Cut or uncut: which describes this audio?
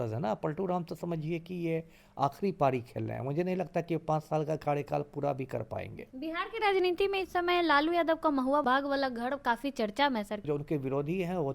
cut